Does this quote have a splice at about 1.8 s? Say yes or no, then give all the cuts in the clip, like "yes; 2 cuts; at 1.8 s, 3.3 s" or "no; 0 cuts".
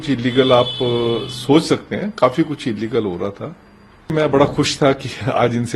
no; 1 cut; at 4.1 s